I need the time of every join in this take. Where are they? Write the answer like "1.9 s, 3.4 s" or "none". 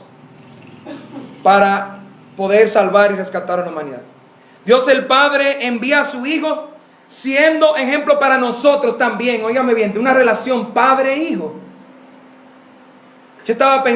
12.5 s